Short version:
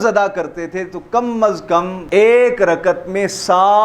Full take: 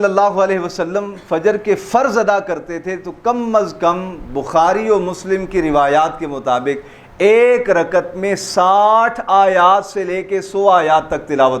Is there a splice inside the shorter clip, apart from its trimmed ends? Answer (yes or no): yes